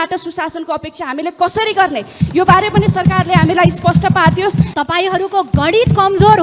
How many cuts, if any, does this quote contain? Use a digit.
1